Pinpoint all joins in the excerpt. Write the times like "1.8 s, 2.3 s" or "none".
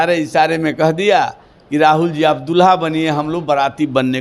none